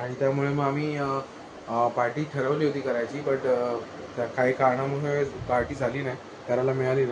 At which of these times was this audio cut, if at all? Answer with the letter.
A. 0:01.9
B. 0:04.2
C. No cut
C